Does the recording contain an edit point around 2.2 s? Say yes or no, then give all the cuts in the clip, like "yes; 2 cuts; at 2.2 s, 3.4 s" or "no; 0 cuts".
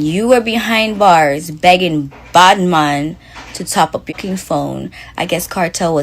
no; 1 cut; at 4.1 s